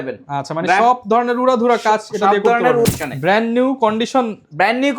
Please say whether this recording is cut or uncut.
cut